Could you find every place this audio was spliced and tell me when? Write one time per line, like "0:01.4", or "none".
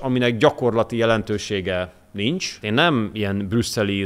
0:02.6